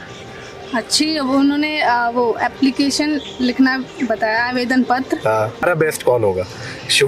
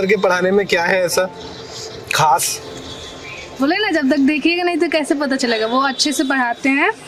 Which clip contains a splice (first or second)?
first